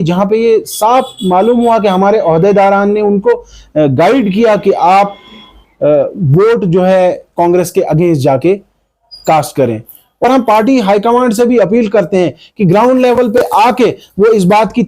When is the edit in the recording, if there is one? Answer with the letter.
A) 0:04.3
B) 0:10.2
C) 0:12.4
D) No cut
B